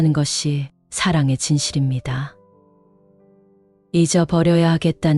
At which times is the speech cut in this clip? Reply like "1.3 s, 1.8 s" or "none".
none

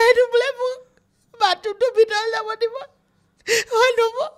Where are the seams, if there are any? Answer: none

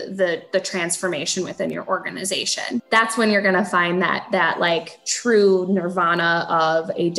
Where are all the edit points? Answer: 2.8 s

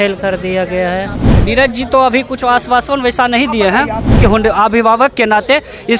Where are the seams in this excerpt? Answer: 1.3 s, 4.2 s

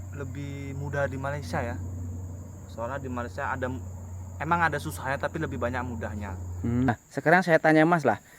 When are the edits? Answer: 6.9 s

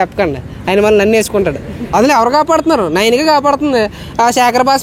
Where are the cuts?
1.8 s

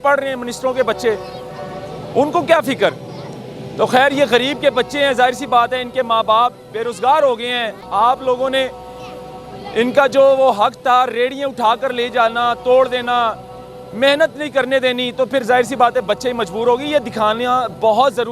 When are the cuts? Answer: none

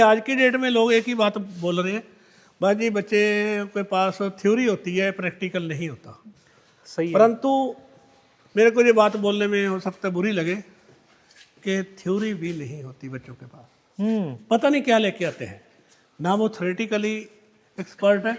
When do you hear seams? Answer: none

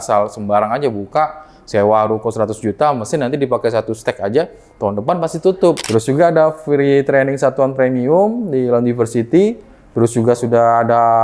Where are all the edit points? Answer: 5.8 s

